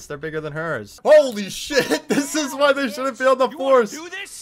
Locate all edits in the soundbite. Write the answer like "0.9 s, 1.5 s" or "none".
0.9 s